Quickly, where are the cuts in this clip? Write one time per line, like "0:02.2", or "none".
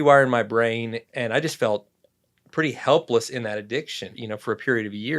0:01.0
0:04.2